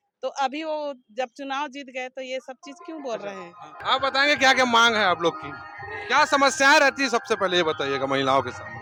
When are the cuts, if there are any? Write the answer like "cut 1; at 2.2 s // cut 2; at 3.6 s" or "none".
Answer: none